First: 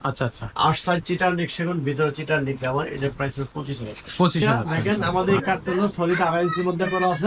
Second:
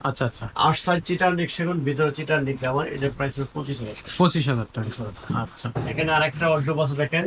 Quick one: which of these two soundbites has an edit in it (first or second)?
first